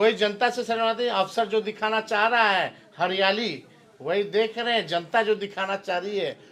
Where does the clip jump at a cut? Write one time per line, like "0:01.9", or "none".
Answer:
none